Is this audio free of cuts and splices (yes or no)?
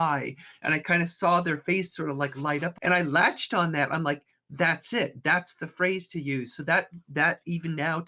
no